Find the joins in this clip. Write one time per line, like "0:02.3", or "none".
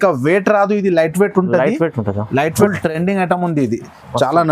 0:02.7